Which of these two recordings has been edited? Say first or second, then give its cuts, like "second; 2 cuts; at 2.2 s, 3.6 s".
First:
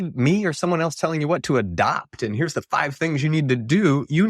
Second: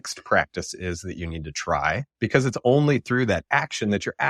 second; 1 cut; at 2.1 s